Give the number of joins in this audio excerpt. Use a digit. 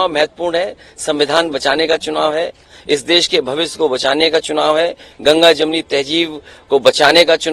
0